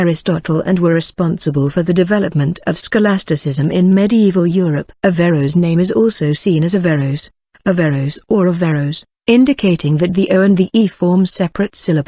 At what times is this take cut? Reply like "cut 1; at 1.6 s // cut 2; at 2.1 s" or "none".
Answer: none